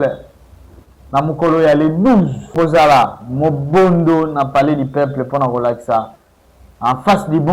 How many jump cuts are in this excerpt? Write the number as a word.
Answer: one